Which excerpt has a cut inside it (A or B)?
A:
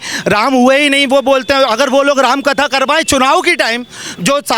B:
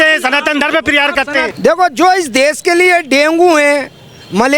B